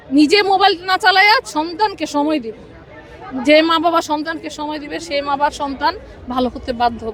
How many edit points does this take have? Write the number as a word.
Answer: zero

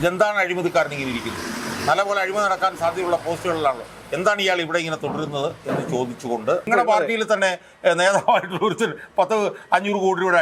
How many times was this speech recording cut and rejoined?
one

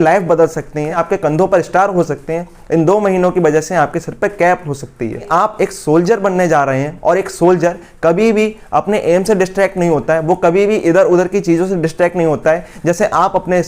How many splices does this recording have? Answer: two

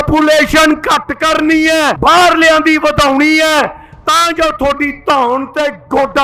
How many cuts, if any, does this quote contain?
one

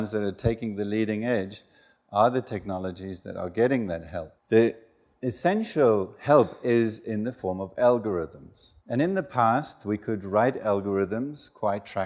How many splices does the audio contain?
one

